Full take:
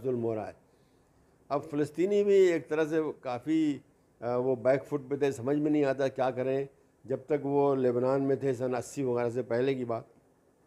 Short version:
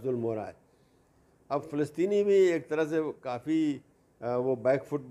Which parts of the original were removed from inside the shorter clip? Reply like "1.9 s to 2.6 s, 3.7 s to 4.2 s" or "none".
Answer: none